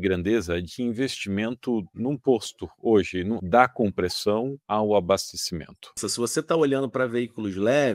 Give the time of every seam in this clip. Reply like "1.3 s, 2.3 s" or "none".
1.9 s, 3.4 s, 4.6 s, 6.0 s